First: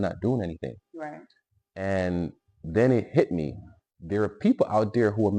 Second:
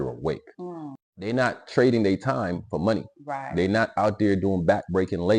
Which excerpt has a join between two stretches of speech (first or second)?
second